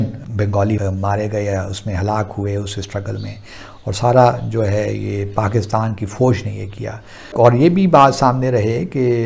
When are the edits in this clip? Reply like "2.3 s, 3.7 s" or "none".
7.2 s